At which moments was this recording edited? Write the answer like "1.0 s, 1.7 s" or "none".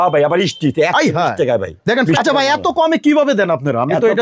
2.1 s